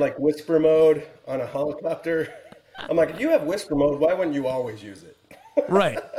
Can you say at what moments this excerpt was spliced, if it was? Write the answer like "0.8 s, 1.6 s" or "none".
none